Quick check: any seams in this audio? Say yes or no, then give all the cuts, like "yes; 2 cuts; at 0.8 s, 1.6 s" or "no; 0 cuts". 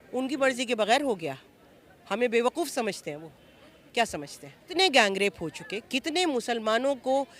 yes; 1 cut; at 4.7 s